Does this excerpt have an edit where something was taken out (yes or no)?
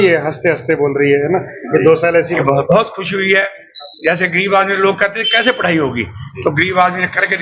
yes